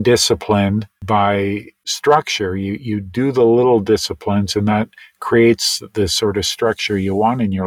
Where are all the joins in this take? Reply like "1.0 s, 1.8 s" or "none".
0.9 s, 1.8 s

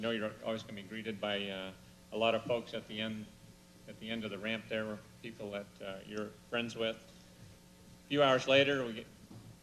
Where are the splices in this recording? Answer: none

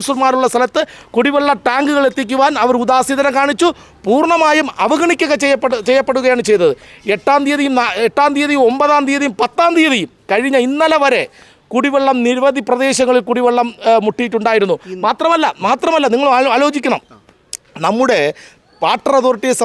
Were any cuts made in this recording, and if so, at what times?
none

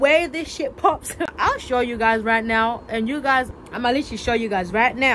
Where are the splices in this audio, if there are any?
1.3 s, 3.5 s

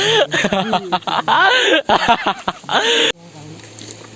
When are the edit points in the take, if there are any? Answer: 3.1 s

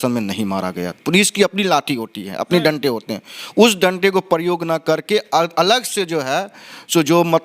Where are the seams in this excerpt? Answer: 1.0 s

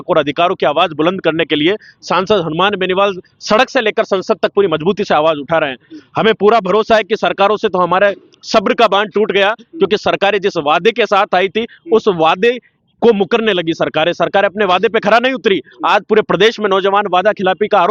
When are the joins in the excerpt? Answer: none

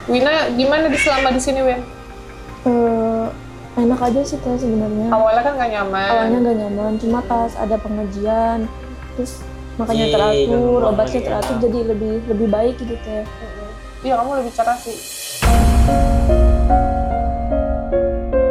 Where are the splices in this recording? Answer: none

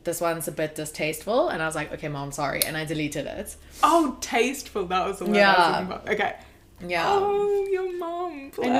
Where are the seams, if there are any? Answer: none

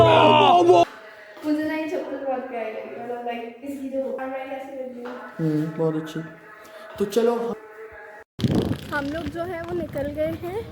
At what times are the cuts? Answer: 0.8 s, 4.2 s, 7.5 s

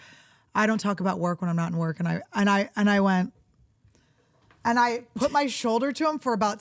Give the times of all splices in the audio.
none

